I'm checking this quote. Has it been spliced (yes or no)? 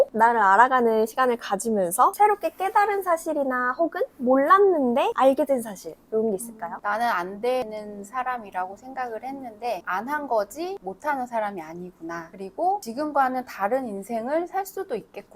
no